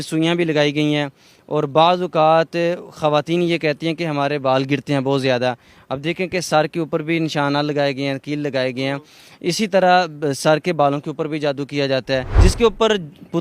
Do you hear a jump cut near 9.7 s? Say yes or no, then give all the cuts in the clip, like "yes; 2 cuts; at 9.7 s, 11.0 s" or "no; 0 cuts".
no; 1 cut; at 12.3 s